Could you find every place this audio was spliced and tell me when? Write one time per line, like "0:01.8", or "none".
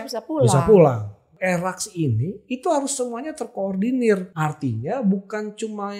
0:01.3
0:04.3